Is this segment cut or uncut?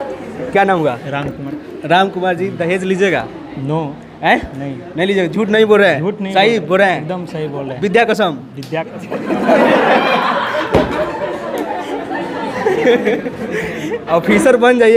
uncut